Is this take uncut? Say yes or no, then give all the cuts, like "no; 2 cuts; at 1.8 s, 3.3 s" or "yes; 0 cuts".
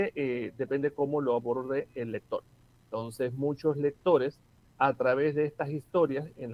yes; 0 cuts